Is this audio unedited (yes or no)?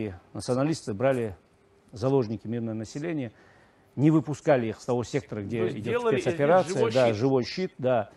yes